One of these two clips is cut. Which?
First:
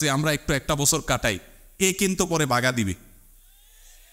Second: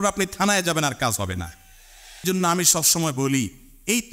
second; 1 cut; at 2.2 s

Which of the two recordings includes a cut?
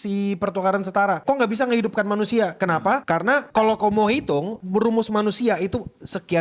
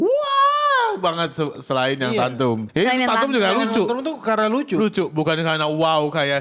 first; 3 cuts; at 1.2 s, 2.7 s, 4.5 s

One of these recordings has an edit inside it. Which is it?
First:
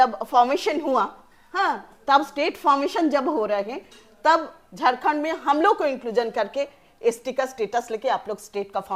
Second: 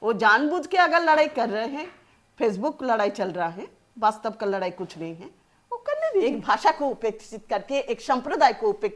second; 1 cut; at 6.2 s

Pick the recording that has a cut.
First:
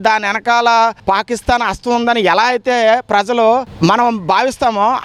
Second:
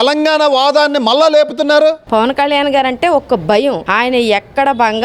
second; 1 cut; at 2.0 s

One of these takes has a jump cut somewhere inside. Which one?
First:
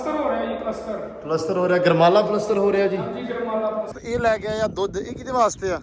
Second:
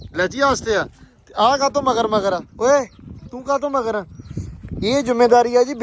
first; 1 cut; at 4.0 s

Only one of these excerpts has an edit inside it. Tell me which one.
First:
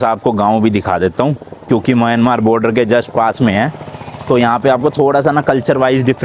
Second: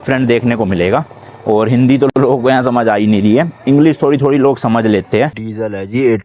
second; 1 cut; at 5.3 s

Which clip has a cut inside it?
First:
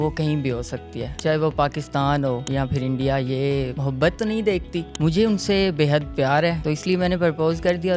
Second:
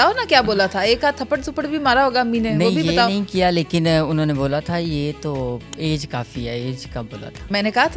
first; 5 cuts; at 1.1 s, 2.4 s, 3.8 s, 4.8 s, 6.6 s

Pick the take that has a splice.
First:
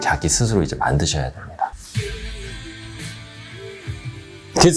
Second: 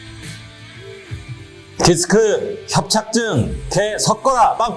first; 1 cut; at 1.7 s

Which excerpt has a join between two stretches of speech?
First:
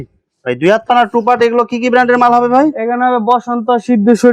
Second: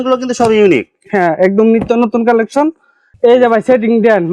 second; 1 cut; at 2.9 s

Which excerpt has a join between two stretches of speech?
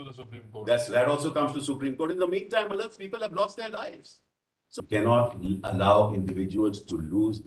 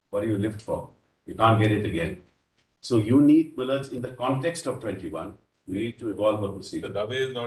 first; 1 cut; at 4.8 s

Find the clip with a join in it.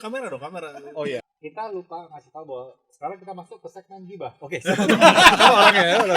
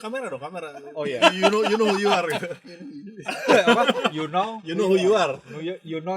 first; 1 cut; at 1.2 s

